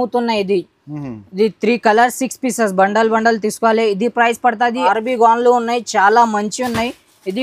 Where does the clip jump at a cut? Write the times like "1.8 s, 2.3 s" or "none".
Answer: 4.9 s